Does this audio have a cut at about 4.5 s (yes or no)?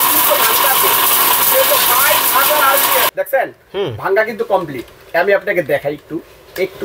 no